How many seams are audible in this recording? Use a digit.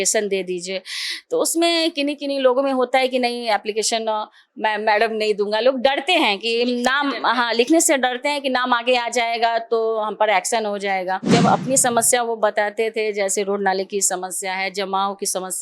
1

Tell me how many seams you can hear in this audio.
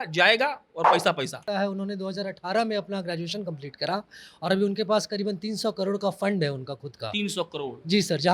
1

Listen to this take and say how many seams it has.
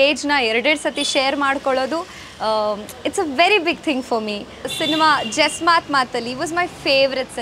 1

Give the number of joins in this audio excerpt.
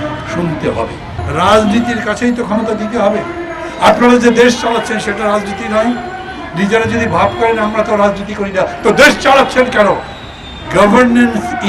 1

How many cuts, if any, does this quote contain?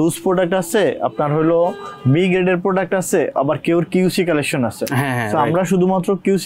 0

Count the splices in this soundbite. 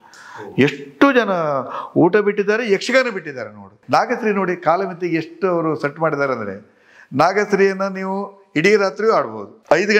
1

